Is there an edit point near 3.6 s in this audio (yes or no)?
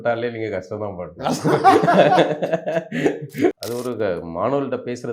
yes